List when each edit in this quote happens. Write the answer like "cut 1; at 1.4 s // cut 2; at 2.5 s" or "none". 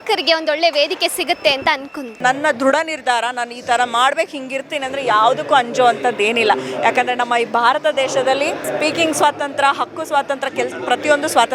cut 1; at 2.2 s